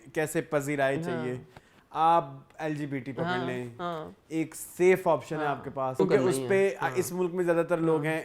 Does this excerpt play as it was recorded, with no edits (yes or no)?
no